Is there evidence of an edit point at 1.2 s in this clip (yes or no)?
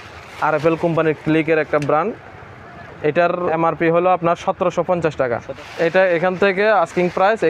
no